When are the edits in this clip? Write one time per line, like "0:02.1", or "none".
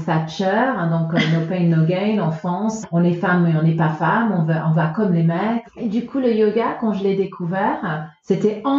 0:02.8
0:05.7